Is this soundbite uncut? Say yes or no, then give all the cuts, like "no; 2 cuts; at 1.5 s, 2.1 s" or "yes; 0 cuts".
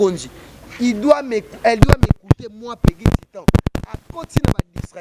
yes; 0 cuts